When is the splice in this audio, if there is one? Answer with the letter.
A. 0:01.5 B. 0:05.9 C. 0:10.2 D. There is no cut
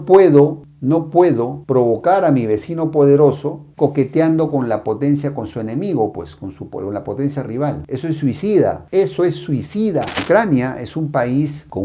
C